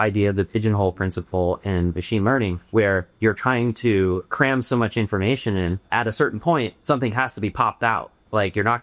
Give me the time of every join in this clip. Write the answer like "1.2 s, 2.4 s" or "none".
2.9 s, 4.2 s, 5.8 s, 6.8 s